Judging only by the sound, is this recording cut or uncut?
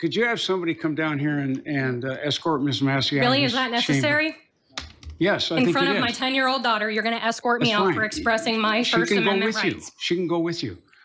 uncut